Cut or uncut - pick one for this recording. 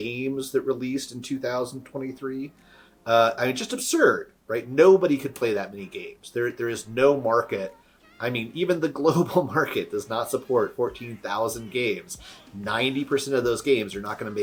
uncut